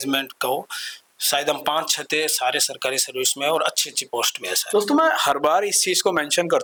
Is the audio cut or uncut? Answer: uncut